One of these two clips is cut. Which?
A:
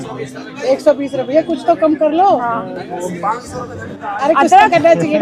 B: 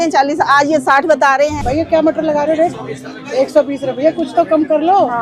B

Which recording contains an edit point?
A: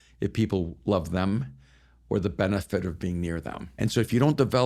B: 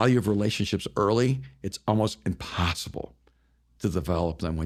A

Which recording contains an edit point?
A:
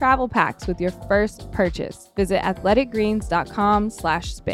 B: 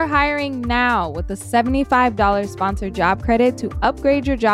A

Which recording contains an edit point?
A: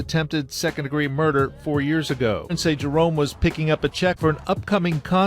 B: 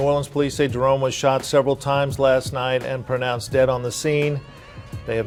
A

